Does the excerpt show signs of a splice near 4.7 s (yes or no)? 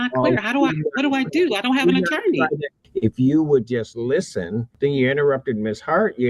yes